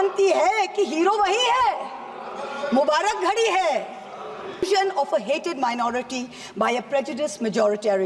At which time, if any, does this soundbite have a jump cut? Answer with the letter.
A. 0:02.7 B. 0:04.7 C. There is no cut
B